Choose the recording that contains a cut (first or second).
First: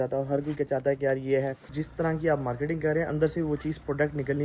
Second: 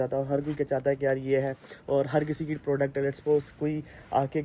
first